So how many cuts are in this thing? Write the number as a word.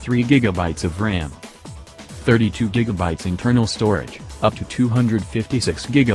zero